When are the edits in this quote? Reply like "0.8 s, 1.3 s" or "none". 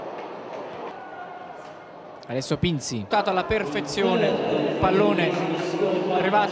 none